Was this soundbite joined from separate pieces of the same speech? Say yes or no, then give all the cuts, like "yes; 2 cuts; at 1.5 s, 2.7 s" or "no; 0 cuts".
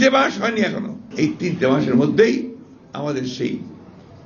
yes; 1 cut; at 1.0 s